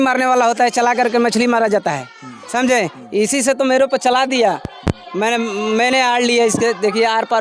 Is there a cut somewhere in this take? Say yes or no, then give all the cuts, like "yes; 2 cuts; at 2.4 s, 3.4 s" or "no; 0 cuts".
no; 0 cuts